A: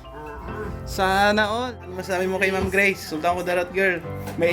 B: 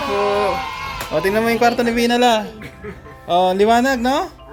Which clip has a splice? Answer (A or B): A